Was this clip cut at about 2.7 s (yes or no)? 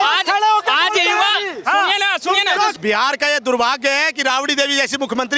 yes